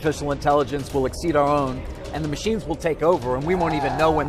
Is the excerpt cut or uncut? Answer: uncut